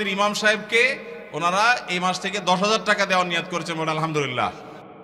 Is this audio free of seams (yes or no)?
yes